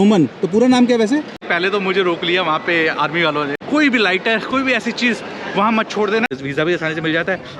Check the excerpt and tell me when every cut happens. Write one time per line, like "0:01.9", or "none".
0:01.4
0:03.6
0:06.3